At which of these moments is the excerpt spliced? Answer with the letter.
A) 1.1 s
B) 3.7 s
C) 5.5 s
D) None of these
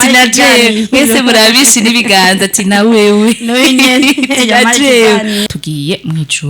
C